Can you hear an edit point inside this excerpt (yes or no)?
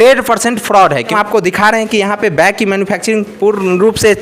yes